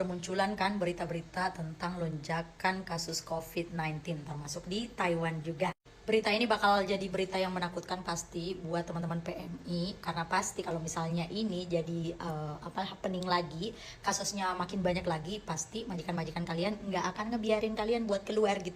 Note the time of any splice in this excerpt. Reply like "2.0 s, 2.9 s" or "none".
none